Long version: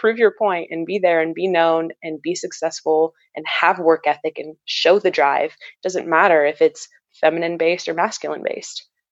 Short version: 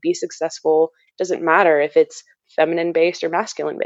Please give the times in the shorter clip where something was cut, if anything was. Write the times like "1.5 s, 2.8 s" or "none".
1.1 s

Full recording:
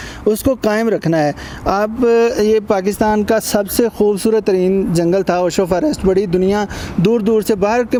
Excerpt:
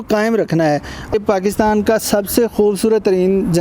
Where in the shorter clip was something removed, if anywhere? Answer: 1.1 s

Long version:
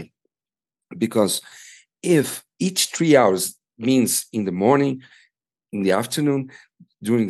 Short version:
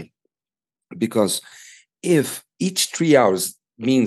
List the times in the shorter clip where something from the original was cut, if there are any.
none

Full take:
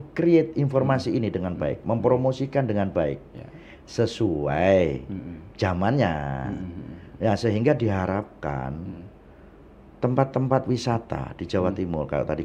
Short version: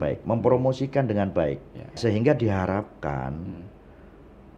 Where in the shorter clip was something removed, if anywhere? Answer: 2.0 s

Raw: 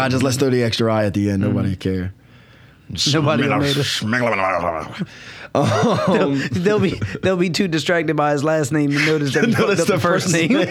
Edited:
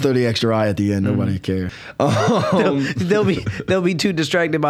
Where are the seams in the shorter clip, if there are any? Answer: 1.8 s

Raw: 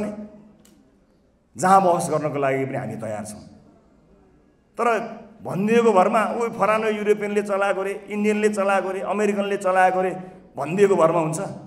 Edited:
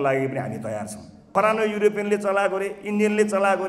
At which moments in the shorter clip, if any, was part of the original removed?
1.3 s

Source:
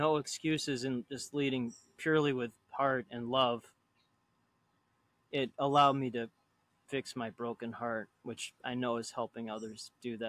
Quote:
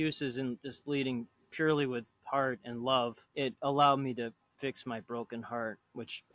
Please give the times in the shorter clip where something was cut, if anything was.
3.2 s, 4.5 s

